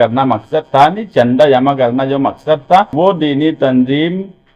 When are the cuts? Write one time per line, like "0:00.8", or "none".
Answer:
0:02.9